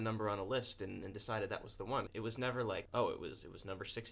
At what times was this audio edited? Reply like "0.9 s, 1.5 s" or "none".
2.1 s

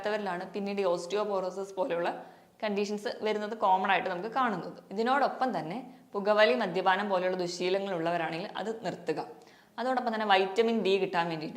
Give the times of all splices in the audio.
none

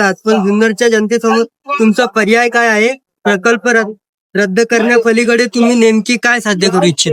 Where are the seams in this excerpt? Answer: none

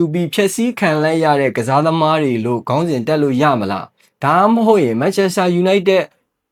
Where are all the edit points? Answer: none

